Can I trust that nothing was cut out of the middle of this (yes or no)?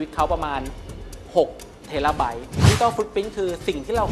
no